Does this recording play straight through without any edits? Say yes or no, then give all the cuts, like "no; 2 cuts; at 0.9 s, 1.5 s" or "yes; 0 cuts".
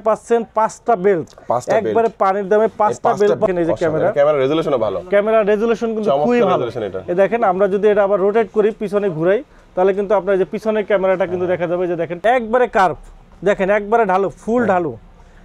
no; 2 cuts; at 3.5 s, 12.1 s